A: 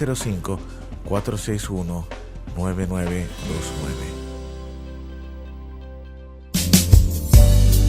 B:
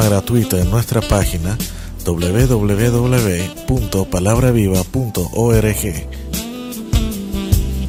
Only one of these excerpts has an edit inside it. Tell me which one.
A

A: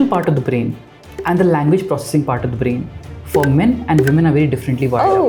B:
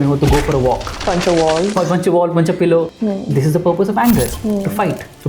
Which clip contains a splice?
B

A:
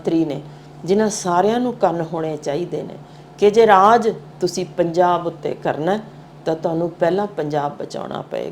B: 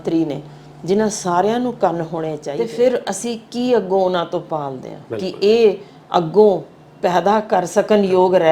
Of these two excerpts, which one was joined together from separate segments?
B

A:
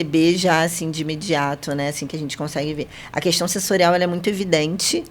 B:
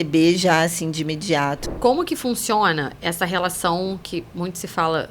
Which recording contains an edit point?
B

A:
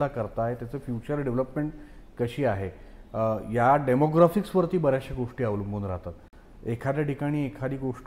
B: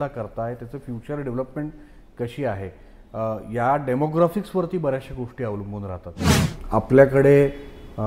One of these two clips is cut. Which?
B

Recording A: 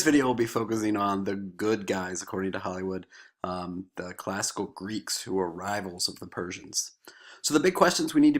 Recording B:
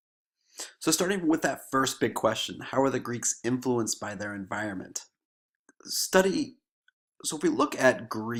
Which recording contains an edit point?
A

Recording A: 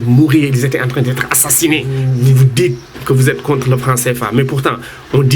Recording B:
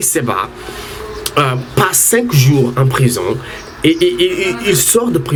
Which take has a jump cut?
A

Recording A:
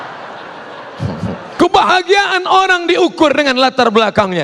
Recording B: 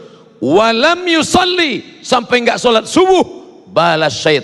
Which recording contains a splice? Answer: A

